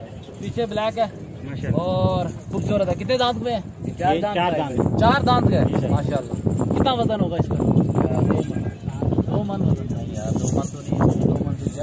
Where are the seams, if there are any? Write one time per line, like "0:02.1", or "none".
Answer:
none